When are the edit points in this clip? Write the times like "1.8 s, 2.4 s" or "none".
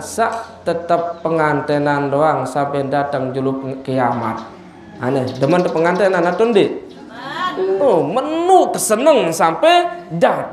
none